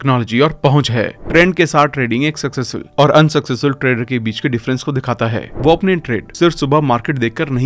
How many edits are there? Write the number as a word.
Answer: two